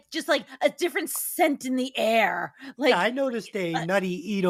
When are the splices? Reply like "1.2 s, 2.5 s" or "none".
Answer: none

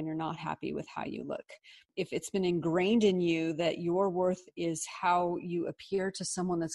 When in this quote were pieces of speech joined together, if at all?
1.9 s

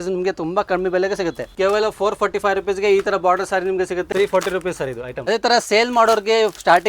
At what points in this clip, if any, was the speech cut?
1.5 s, 4.1 s, 5.2 s

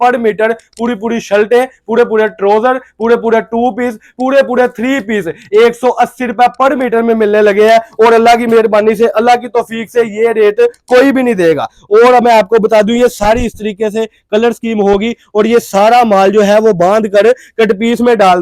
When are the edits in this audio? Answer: none

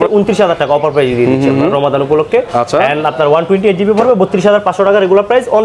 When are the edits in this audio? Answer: none

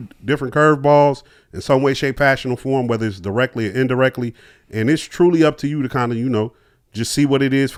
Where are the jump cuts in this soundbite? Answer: none

